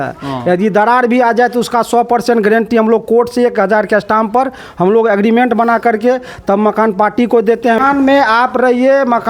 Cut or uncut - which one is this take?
cut